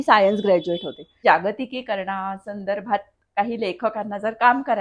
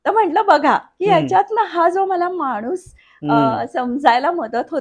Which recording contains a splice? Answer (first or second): first